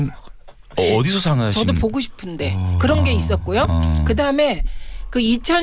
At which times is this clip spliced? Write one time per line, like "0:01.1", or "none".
0:02.1